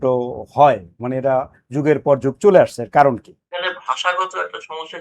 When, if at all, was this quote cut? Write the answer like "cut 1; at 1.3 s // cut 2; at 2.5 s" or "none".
cut 1; at 3.4 s